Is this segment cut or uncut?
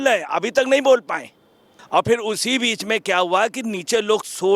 cut